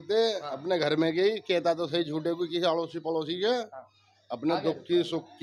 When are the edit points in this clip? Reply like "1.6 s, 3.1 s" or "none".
none